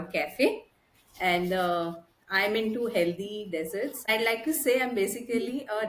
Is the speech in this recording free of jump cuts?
no; 1 cut; at 4.1 s

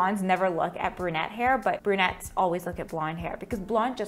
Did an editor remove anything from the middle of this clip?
no; 0 cuts

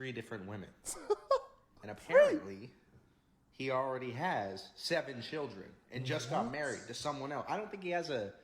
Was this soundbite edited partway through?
no; 0 cuts

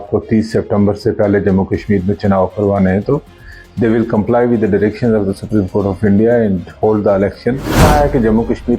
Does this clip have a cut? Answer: yes; 1 cut; at 7.8 s

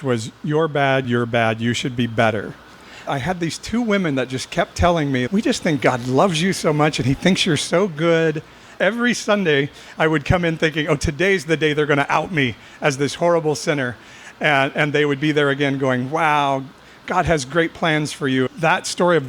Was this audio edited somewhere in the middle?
yes; 3 cuts; at 3.1 s, 8.7 s, 18.5 s

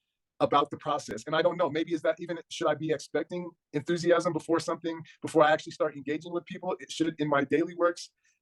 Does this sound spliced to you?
no; 0 cuts

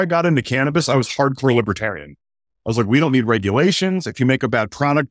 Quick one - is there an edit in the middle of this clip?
no; 0 cuts

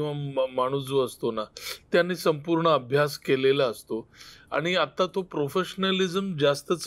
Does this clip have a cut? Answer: no; 0 cuts

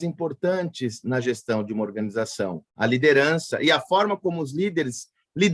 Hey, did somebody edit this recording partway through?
no; 0 cuts

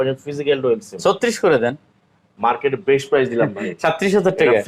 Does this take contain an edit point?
no; 0 cuts

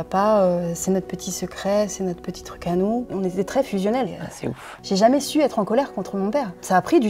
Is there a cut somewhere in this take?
no; 0 cuts

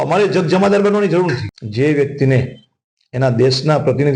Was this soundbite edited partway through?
yes; 1 cut; at 1.5 s

